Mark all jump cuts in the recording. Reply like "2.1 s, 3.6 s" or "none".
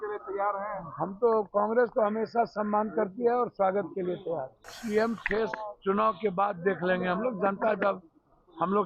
4.7 s